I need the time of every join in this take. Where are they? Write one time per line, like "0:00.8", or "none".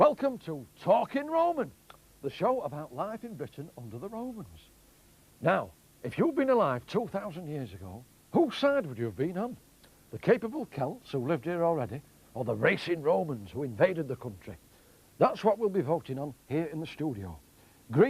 0:08.6